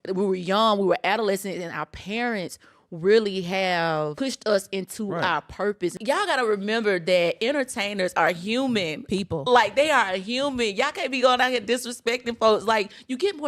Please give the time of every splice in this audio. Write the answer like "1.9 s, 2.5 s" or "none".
4.1 s, 6.0 s